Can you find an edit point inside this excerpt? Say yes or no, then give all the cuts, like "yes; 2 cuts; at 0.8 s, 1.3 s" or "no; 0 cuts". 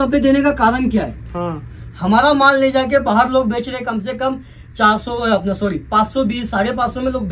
no; 0 cuts